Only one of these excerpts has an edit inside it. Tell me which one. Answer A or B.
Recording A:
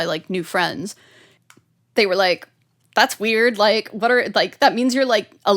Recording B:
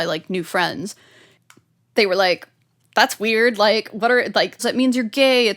B